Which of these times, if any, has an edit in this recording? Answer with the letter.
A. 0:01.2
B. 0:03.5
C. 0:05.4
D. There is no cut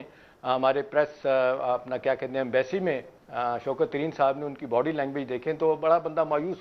D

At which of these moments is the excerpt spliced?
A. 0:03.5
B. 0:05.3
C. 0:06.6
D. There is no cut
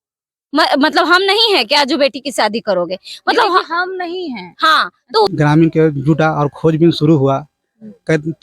B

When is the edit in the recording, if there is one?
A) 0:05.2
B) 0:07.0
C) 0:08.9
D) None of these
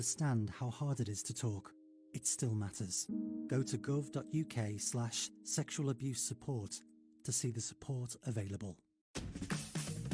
C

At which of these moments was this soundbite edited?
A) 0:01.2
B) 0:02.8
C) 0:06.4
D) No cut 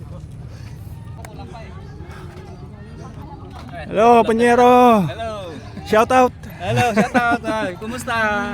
A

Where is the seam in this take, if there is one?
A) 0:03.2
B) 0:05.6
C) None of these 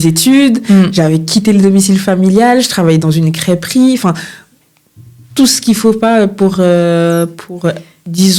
C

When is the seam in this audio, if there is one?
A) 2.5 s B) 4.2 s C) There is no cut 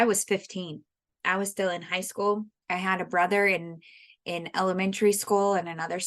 A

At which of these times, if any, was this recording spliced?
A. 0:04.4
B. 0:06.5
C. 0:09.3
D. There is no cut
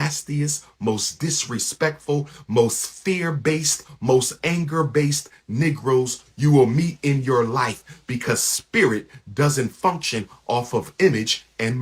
D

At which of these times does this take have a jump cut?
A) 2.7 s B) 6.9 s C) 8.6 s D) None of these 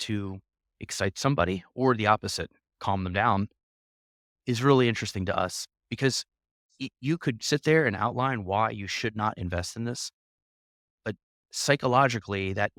D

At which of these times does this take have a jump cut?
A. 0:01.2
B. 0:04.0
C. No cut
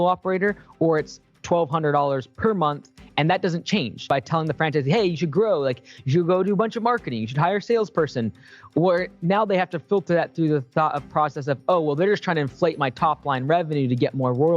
B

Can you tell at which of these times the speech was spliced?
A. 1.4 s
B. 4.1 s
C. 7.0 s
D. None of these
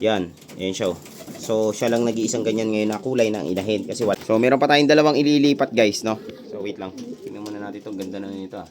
B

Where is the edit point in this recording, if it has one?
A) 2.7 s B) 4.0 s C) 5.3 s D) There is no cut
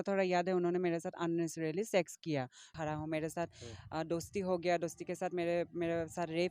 A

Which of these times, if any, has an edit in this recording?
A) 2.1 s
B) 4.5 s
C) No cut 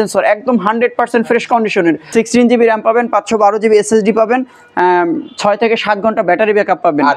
A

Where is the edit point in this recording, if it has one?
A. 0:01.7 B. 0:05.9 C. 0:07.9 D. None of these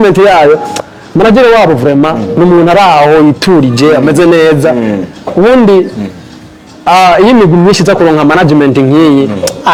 D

